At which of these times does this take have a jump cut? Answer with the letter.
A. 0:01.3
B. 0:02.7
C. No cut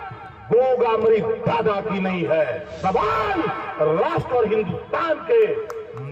B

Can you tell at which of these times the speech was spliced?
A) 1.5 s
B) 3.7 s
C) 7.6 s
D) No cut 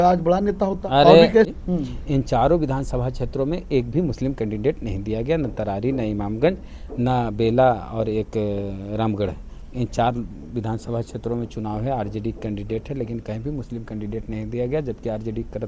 A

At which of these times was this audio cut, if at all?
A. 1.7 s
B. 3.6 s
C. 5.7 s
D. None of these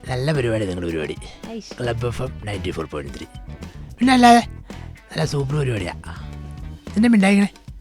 D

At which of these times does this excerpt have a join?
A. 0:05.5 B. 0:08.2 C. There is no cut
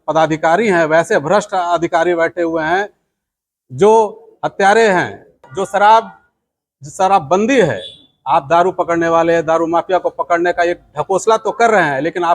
A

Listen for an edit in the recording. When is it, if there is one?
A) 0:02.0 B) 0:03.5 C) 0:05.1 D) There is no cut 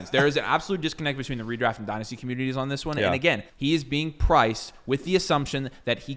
B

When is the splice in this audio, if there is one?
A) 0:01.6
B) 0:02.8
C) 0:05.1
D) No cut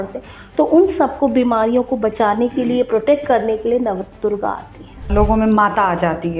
C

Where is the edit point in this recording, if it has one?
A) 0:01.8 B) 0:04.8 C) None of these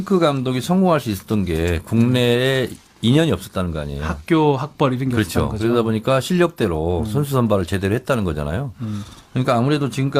A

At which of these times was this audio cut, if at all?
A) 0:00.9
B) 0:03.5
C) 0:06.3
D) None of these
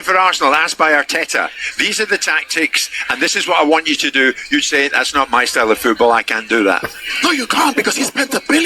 A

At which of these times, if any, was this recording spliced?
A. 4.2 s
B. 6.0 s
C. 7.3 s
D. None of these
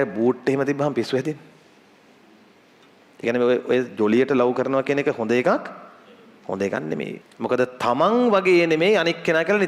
C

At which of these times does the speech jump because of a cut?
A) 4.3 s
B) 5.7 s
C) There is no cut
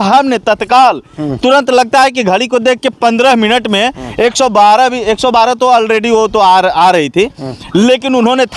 C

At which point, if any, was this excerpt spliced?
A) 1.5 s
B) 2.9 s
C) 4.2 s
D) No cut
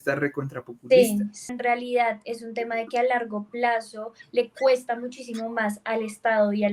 A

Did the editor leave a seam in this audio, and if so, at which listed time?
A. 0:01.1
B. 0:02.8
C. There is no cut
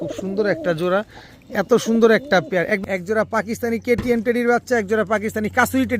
B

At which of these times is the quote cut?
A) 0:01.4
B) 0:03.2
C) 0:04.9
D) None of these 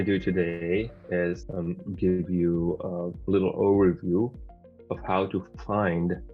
A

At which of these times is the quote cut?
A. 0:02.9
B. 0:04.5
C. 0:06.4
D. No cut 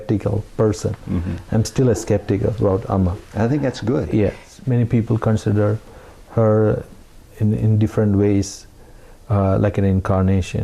B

